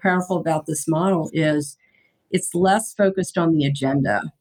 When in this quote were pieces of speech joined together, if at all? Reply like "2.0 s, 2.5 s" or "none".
none